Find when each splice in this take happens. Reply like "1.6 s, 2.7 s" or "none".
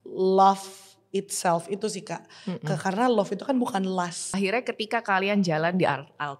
4.3 s